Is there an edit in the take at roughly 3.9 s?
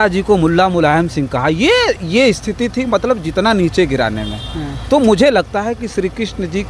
no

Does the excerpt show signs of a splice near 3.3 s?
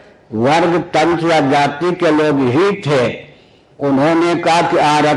no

